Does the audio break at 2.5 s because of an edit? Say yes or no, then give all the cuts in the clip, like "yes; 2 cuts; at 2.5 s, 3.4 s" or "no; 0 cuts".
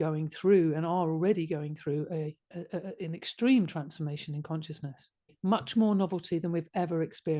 no; 1 cut; at 5.2 s